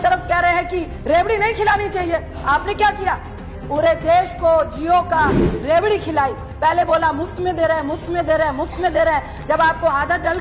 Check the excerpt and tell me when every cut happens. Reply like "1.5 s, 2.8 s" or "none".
0.9 s